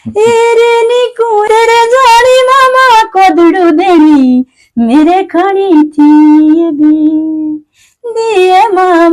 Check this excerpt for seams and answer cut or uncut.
cut